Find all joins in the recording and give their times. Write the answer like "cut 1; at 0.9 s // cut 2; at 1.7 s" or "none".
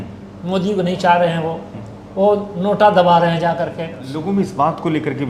cut 1; at 4.1 s